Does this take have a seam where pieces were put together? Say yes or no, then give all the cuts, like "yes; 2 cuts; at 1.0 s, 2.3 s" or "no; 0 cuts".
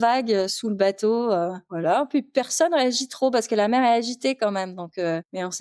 no; 0 cuts